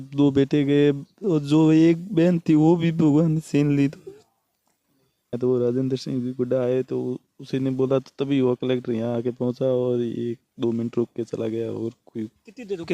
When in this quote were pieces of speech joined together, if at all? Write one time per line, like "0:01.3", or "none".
0:05.3